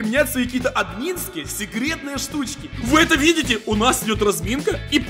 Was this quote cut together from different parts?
yes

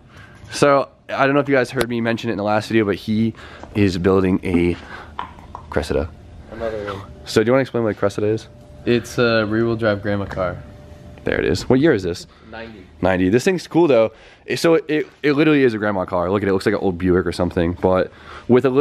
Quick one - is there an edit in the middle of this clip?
no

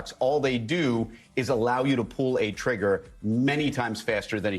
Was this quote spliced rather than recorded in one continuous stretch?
no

